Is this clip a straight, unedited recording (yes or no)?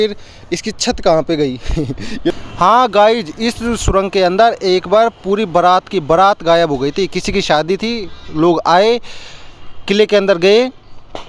no